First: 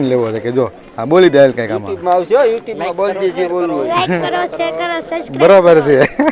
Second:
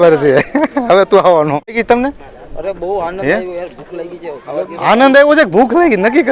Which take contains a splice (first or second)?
second